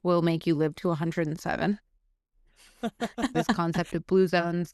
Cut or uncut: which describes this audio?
cut